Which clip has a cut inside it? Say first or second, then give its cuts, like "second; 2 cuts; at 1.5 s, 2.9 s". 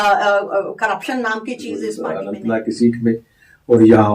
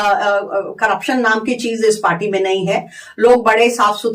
first; 1 cut; at 1.9 s